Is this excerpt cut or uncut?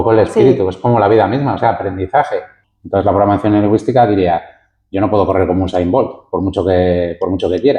cut